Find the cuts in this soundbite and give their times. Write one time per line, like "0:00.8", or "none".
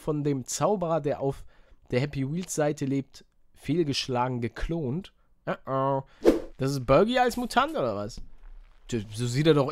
0:06.3